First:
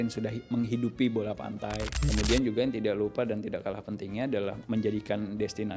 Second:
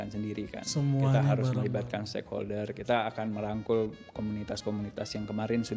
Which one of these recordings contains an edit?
first; 2 cuts; at 2.0 s, 4.6 s

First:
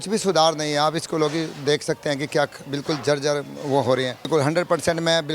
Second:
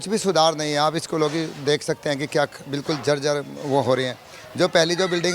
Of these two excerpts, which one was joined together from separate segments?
first; 1 cut; at 4.2 s

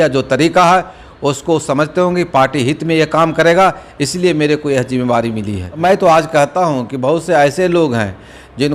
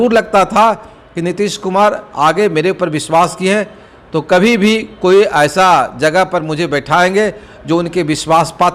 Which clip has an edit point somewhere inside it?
first; 1 cut; at 5.8 s

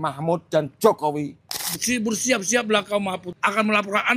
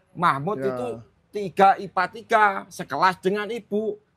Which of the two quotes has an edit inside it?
first; 2 cuts; at 1.6 s, 3.3 s

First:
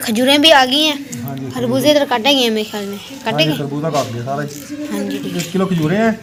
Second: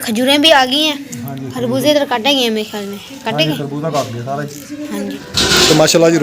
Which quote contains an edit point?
second; 1 cut; at 5.2 s

